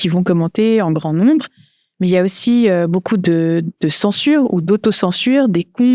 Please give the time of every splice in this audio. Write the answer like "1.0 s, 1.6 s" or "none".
none